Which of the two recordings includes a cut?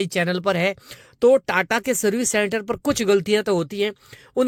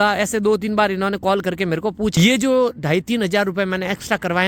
second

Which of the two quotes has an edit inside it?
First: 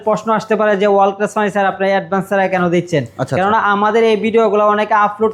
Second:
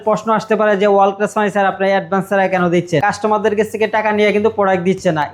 second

